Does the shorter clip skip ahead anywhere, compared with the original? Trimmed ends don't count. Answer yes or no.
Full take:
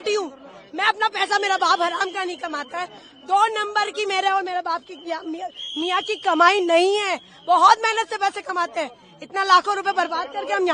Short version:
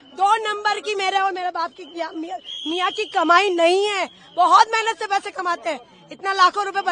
no